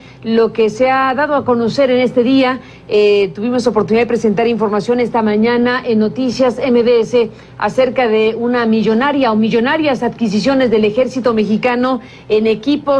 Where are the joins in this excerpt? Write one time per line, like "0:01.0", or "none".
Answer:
0:11.0